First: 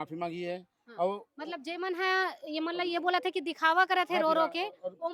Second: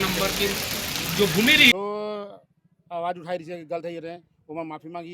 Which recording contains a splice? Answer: second; 1 cut; at 1.7 s

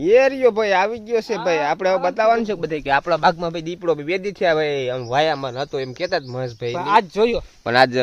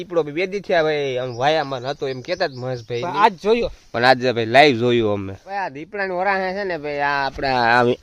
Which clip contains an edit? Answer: second; 1 cut; at 5.4 s

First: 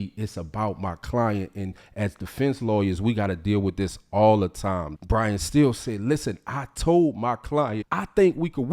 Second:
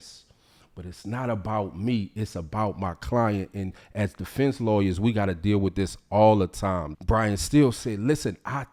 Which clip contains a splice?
first; 1 cut; at 7.8 s

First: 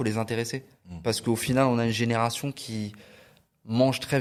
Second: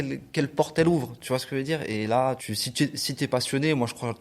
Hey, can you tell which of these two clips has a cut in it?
second; 1 cut; at 2.5 s

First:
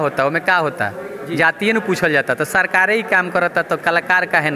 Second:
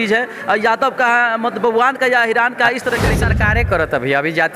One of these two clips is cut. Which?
second; 1 cut; at 3.2 s

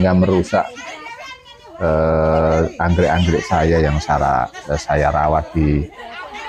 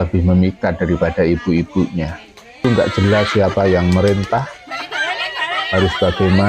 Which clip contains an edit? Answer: second; 1 cut; at 2.6 s

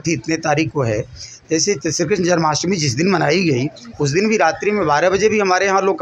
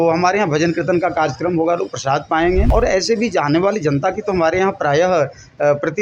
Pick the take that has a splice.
second; 1 cut; at 2.7 s

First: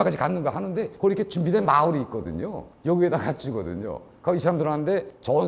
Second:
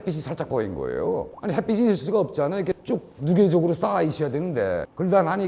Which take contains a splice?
first; 1 cut; at 4.0 s

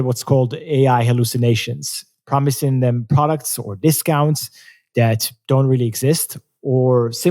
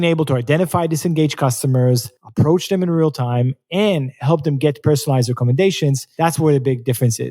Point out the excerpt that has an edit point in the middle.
second; 2 cuts; at 2.2 s, 6.0 s

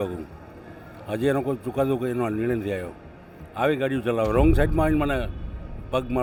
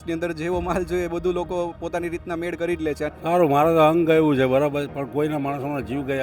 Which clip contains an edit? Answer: second; 1 cut; at 3.1 s

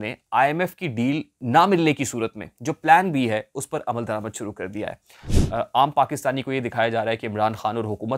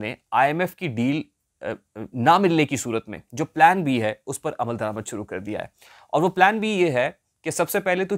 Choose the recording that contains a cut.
first; 2 cuts; at 1.3 s, 5.2 s

